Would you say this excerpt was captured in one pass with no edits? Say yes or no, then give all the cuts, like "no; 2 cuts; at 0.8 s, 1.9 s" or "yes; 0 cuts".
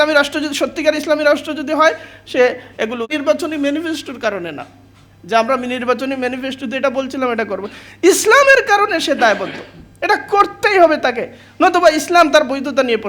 no; 1 cut; at 3.2 s